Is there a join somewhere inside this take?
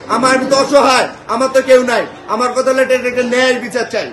no; 0 cuts

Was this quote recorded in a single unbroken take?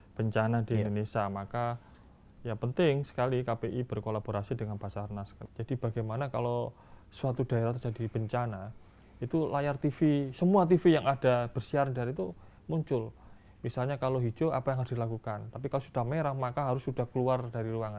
no; 1 cut; at 5.3 s

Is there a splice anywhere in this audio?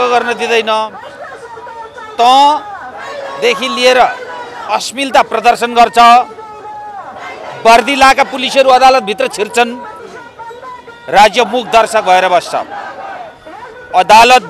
no; 0 cuts

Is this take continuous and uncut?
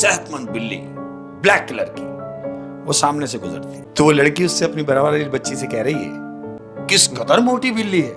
no; 2 cuts; at 3.8 s, 6.5 s

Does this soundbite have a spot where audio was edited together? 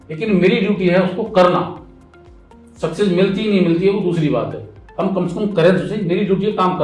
no; 0 cuts

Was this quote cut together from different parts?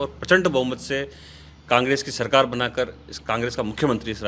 no; 0 cuts

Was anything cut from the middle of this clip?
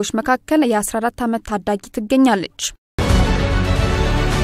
yes; 1 cut; at 3.0 s

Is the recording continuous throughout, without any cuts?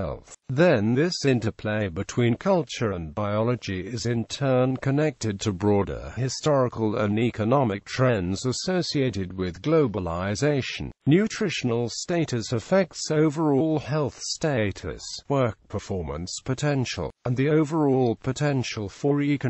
no; 1 cut; at 4.9 s

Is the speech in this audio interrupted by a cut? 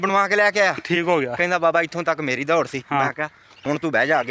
no; 0 cuts

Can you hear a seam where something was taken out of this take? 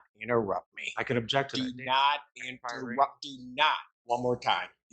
yes; 1 cut; at 3.9 s

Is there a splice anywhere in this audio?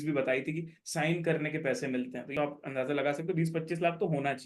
yes; 1 cut; at 2.3 s

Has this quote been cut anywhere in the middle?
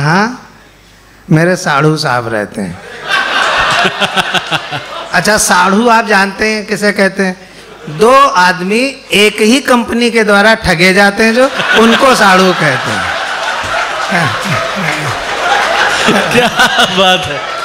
no; 0 cuts

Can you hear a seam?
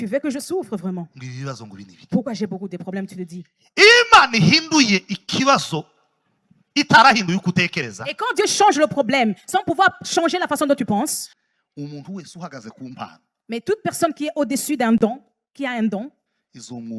yes; 1 cut; at 11.2 s

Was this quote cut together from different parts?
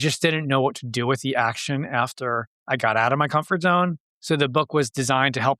yes; 2 cuts; at 2.5 s, 4.1 s

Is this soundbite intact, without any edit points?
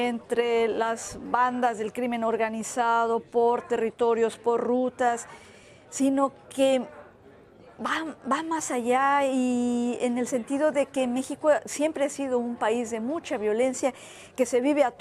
no; 1 cut; at 6.3 s

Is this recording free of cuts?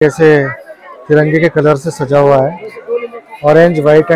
yes; 0 cuts

